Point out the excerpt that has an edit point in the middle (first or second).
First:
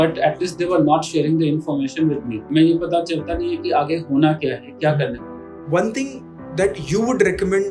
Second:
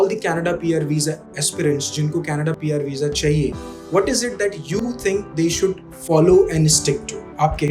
first